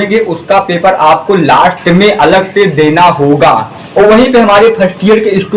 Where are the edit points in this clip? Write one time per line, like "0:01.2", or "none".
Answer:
0:03.8